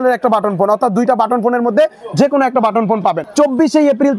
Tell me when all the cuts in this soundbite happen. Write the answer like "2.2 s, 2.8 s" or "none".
3.2 s